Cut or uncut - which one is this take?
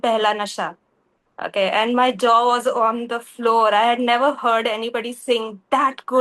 uncut